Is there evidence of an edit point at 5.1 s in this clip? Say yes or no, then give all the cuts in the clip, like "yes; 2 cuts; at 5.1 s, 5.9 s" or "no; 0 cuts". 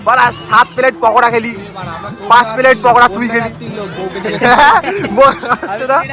no; 2 cuts; at 1.6 s, 3.6 s